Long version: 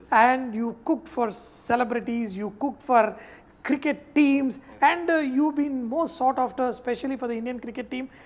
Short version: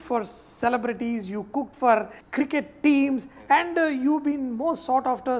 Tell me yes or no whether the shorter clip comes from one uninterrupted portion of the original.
no